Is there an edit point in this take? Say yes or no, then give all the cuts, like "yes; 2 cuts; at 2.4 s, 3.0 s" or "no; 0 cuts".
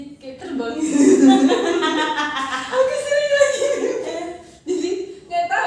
no; 0 cuts